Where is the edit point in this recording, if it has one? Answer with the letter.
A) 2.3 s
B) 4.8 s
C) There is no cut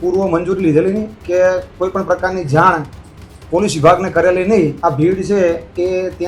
B